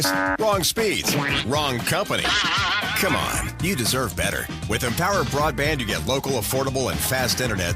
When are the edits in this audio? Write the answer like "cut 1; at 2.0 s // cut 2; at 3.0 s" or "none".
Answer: none